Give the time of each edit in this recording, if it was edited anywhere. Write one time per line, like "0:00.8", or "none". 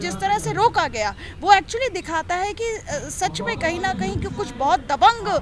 none